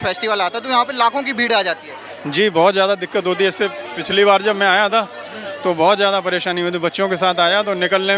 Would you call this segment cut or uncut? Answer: uncut